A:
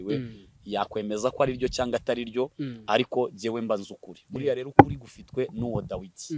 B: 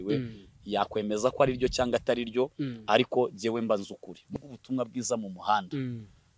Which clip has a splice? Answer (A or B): B